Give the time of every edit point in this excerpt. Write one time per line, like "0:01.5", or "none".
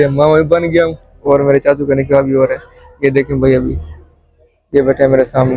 none